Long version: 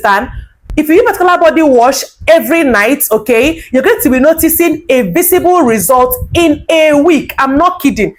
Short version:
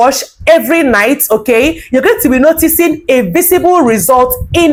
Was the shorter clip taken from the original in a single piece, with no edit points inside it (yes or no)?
yes